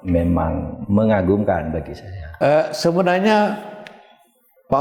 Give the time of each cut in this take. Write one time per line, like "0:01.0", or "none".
0:02.3